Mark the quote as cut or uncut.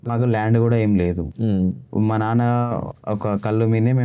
uncut